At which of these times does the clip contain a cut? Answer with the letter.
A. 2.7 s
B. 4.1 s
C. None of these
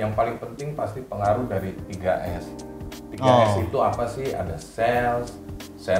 C